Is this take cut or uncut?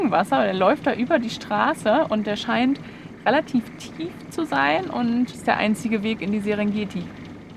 cut